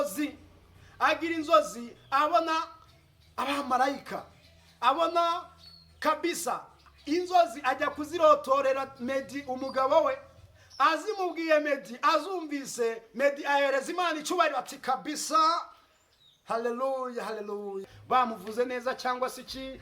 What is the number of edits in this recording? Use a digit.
1